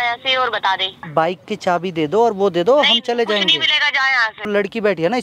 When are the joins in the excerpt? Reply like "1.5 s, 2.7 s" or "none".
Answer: 1.1 s, 4.5 s

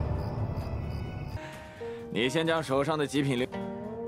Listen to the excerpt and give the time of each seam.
1.3 s

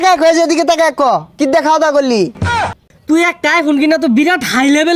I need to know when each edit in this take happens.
2.5 s

